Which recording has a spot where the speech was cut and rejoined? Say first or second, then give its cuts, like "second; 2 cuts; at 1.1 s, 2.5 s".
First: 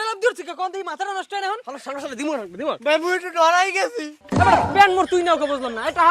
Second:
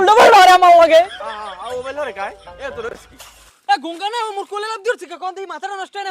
first; 1 cut; at 4.1 s